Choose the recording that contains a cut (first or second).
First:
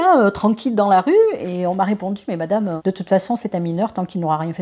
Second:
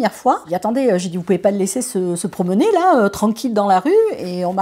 first